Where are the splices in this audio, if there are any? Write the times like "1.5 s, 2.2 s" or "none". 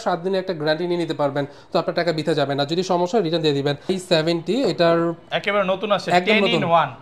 4.0 s